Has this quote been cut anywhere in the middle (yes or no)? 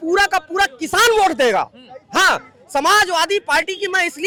no